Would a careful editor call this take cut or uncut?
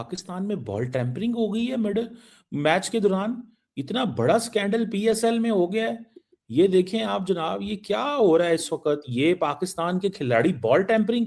uncut